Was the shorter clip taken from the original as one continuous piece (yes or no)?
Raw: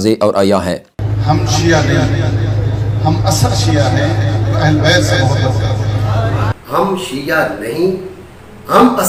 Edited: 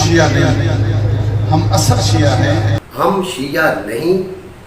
no